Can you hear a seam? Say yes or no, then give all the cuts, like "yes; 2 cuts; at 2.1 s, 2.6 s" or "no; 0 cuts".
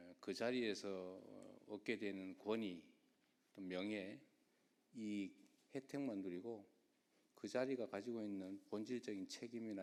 no; 0 cuts